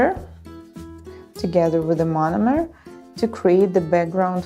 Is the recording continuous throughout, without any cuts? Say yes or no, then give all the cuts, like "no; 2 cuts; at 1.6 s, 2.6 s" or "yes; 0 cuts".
yes; 0 cuts